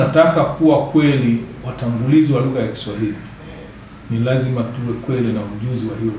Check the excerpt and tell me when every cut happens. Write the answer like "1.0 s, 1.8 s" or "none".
none